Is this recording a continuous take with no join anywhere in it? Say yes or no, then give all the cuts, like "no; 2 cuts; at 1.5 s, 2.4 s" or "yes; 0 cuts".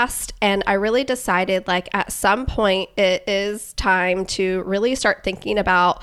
yes; 0 cuts